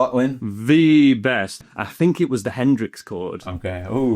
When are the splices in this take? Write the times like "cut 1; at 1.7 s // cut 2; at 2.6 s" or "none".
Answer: cut 1; at 1.5 s